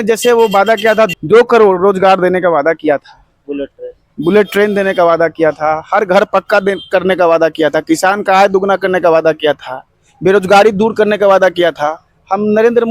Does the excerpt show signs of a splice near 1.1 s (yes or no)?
yes